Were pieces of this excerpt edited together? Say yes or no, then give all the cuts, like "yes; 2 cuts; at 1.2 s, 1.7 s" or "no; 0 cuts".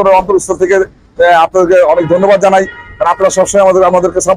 no; 0 cuts